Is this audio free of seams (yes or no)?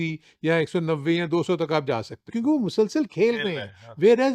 no